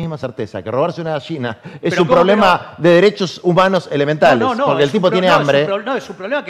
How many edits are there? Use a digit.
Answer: 0